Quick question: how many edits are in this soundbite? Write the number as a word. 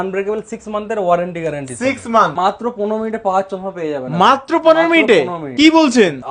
one